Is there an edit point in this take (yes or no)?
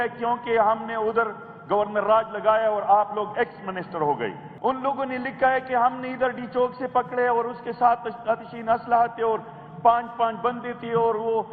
yes